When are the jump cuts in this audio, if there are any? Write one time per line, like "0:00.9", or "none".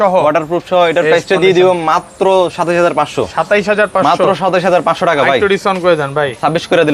none